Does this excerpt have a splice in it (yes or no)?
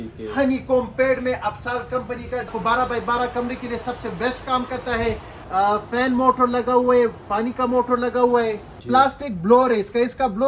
yes